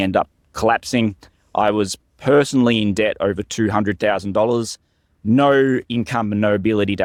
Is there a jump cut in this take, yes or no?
no